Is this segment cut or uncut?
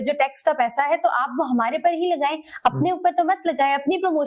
uncut